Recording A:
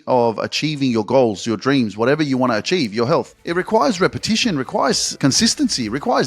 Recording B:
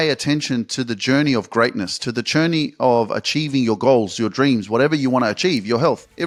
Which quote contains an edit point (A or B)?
A